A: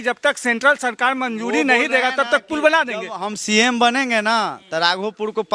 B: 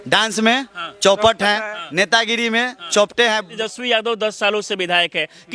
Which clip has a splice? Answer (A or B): B